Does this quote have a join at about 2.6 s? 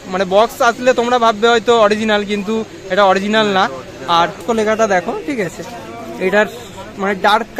no; 1 cut; at 4.4 s

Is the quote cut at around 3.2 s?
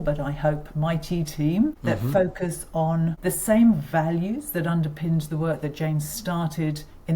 yes; 2 cuts; at 1.8 s, 3.2 s

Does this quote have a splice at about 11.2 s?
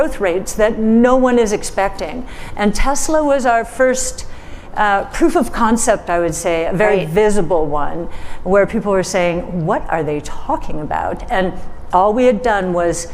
yes; 1 cut; at 11.2 s

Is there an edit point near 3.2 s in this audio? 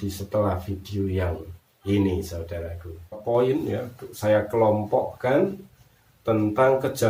yes; 1 cut; at 3.2 s

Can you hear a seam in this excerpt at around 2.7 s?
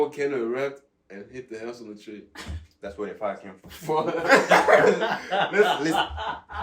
no; 0 cuts

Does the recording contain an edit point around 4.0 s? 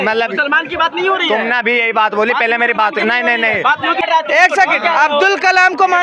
yes; 1 cut; at 4.0 s

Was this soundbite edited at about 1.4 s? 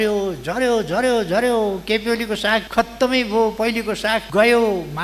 no; 2 cuts; at 2.7 s, 4.2 s

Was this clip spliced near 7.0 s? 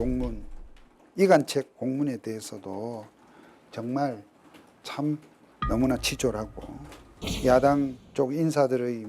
yes; 3 cuts; at 5.4 s, 7.0 s, 8.0 s

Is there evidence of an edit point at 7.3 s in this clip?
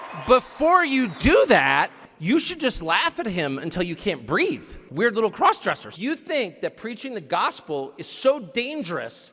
no; 3 cuts; at 2.0 s, 4.8 s, 5.9 s

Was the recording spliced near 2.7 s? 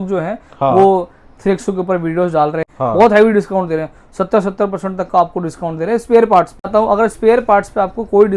yes; 2 cuts; at 2.7 s, 6.7 s

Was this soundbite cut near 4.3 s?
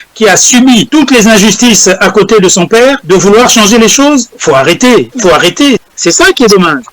yes; 4 cuts; at 0.9 s, 3.0 s, 4.3 s, 5.3 s

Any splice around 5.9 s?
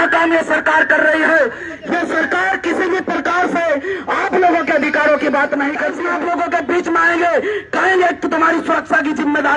yes; 1 cut; at 5.9 s

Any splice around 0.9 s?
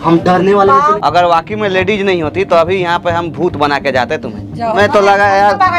yes; 2 cuts; at 0.9 s, 4.8 s

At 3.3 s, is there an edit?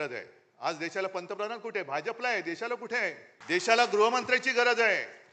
yes; 1 cut; at 3.3 s

